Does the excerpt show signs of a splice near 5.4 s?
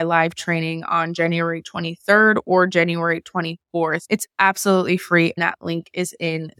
yes; 1 cut; at 5.4 s

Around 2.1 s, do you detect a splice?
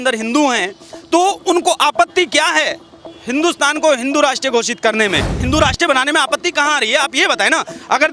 no; 1 cut; at 5.5 s

